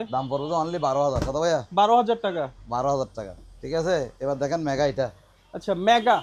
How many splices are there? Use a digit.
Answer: 0